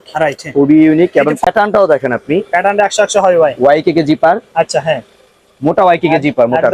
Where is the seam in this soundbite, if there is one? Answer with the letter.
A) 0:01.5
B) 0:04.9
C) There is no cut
A